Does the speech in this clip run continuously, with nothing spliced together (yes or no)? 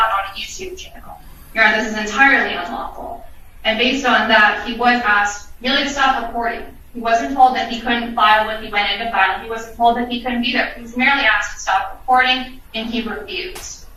yes